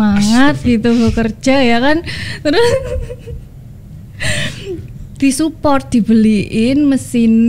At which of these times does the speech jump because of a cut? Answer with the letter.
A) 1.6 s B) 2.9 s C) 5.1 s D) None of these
D